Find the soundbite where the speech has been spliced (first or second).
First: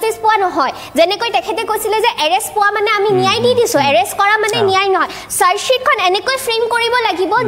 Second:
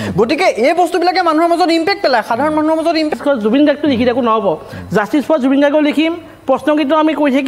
second